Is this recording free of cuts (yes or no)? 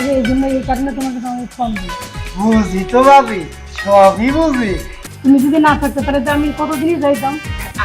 no